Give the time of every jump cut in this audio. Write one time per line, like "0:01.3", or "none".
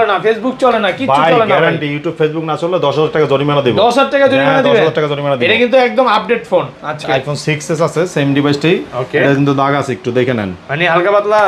0:07.0